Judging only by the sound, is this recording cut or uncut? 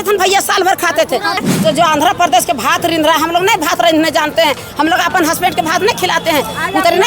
cut